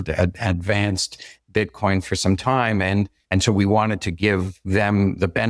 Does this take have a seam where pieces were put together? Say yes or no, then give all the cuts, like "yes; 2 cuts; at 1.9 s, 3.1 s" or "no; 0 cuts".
yes; 2 cuts; at 3.2 s, 4.6 s